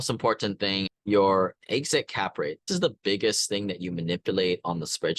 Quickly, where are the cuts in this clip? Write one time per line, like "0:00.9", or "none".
0:00.9
0:02.7